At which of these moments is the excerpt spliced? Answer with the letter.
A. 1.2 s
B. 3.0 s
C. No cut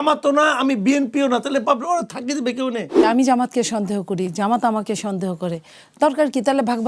B